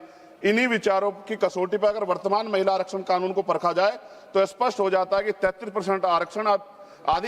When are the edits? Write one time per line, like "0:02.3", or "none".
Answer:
none